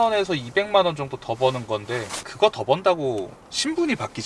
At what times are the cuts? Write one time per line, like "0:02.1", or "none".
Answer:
0:02.3